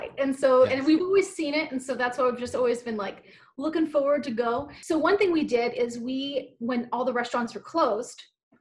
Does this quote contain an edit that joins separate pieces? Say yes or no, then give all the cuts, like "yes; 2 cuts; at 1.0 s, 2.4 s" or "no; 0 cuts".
yes; 1 cut; at 4.7 s